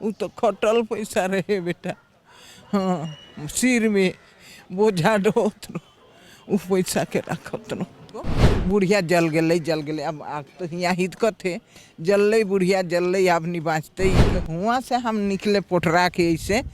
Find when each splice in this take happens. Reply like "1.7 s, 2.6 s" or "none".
8.4 s, 14.2 s

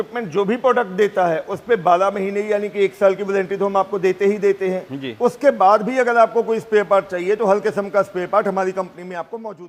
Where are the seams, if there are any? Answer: none

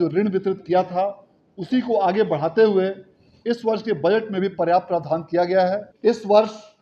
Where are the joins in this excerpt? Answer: 5.9 s

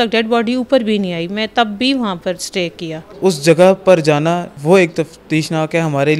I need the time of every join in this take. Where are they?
3.1 s, 4.5 s

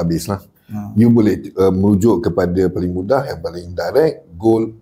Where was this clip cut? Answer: none

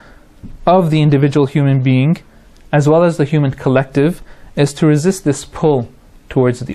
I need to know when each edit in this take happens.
3.0 s

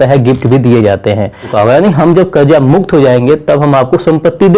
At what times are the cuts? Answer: 1.5 s

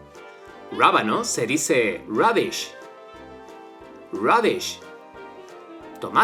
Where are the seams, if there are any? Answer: none

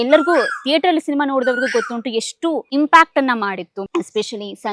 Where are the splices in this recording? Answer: 2.7 s, 3.7 s

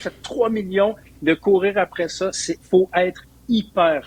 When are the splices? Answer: none

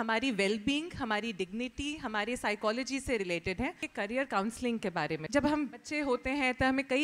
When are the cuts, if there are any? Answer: 3.9 s, 5.2 s, 5.9 s

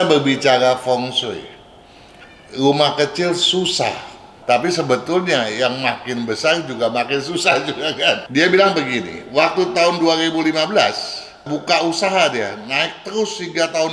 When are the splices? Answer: 4.3 s, 8.2 s

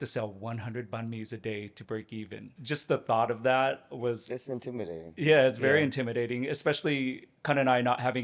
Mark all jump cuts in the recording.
2.5 s

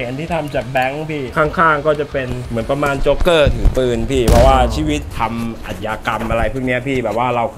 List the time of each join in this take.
1.3 s, 5.1 s

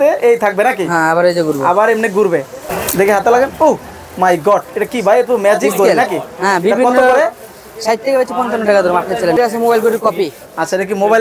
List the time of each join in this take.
2.7 s, 9.4 s

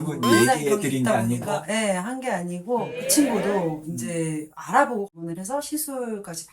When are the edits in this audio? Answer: 2.8 s, 5.1 s

